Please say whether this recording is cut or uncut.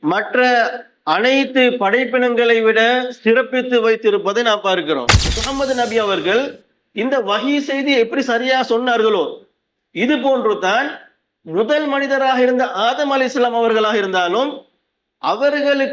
cut